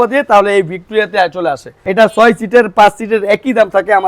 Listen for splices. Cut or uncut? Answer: cut